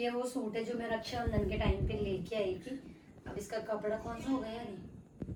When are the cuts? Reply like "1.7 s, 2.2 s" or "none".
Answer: none